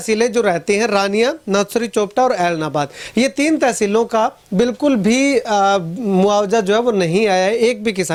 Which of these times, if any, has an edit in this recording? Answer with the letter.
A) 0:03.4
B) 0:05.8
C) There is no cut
C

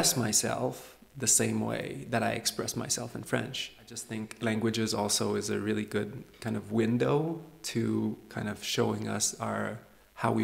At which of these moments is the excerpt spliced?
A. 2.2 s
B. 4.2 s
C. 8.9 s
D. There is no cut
B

